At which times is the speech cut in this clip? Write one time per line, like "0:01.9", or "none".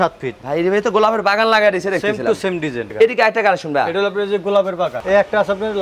0:02.8
0:05.0